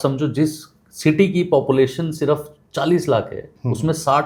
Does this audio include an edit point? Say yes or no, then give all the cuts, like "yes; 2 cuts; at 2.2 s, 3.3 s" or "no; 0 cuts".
no; 0 cuts